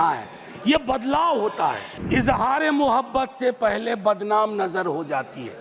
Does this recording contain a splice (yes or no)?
yes